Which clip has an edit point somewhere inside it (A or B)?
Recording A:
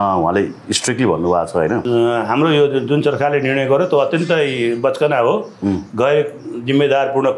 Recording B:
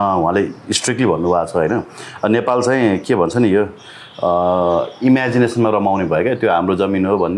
A